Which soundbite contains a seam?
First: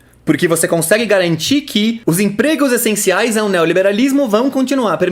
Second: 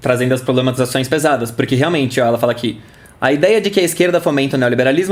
first; 1 cut; at 2.0 s

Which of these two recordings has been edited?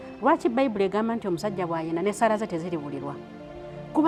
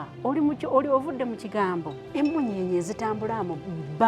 second; 1 cut; at 2.0 s

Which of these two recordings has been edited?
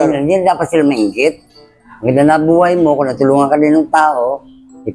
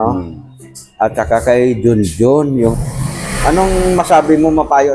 second; 1 cut; at 2.6 s

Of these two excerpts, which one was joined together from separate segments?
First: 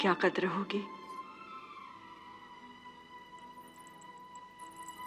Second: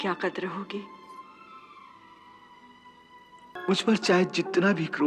second; 1 cut; at 3.6 s

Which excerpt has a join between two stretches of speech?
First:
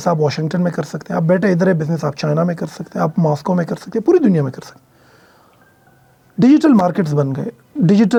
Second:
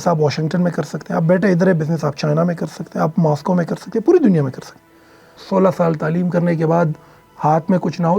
second; 1 cut; at 5.4 s

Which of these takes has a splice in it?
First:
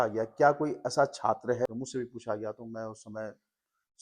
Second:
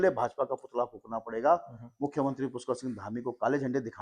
first; 1 cut; at 1.7 s

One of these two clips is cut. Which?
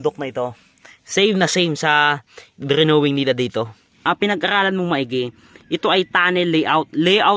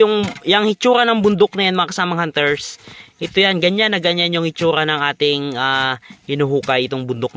first; 1 cut; at 3.9 s

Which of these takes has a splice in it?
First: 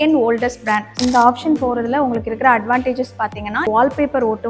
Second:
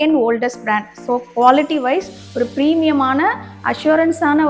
first; 1 cut; at 1.0 s

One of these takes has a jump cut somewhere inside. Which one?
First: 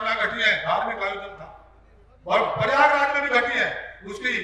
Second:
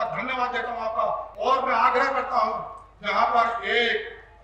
second; 1 cut; at 1.3 s

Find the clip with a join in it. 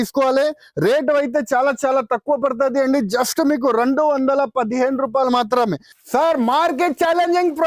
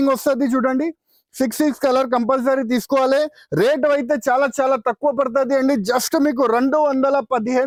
first; 1 cut; at 5.9 s

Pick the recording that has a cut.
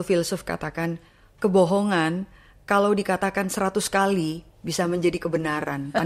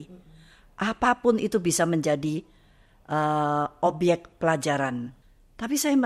second; 1 cut; at 5.2 s

